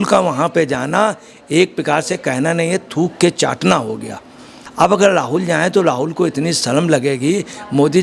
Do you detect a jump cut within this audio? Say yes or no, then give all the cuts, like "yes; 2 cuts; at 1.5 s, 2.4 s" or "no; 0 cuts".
yes; 1 cut; at 4.6 s